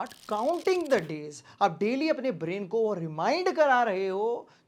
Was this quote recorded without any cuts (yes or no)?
yes